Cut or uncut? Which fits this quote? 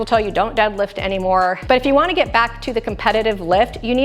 cut